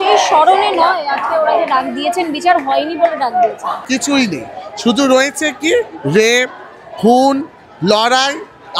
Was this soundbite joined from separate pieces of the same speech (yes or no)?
yes